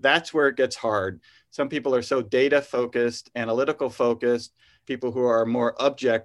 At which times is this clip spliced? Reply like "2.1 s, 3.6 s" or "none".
1.2 s, 4.8 s